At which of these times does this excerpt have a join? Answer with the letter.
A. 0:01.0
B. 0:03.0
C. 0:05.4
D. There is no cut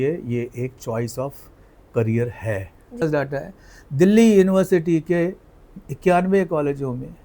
B